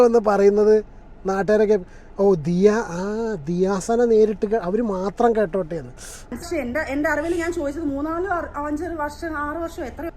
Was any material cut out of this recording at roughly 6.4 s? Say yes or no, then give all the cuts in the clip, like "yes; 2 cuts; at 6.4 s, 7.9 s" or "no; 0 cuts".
yes; 1 cut; at 6.4 s